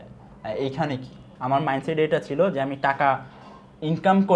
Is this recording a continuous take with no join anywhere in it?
no; 1 cut; at 1.3 s

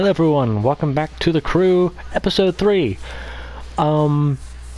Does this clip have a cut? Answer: yes; 1 cut; at 2.0 s

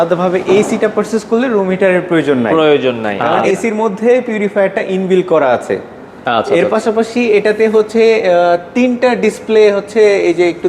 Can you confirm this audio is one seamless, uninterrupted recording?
no; 1 cut; at 3.2 s

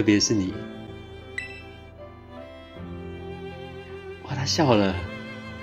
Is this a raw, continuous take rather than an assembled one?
yes; 0 cuts

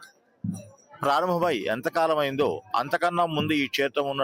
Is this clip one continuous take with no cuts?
yes; 0 cuts

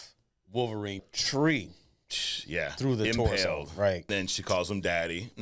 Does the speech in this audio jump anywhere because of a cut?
yes; 2 cuts; at 1.0 s, 4.1 s

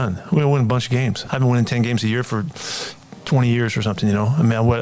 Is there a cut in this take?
yes; 1 cut; at 1.2 s

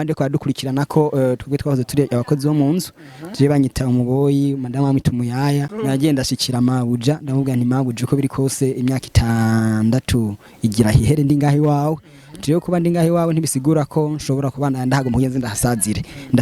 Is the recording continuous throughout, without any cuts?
no; 1 cut; at 5.7 s

